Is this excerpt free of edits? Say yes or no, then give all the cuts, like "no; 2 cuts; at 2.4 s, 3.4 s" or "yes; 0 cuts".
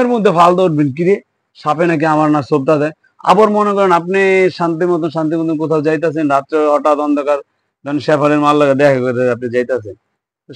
yes; 0 cuts